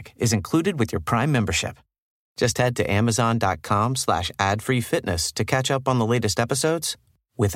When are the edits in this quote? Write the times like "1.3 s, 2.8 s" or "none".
none